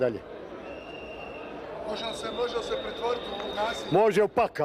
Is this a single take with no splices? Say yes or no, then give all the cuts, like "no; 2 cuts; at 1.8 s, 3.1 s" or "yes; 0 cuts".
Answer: yes; 0 cuts